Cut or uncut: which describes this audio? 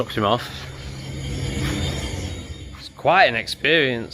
uncut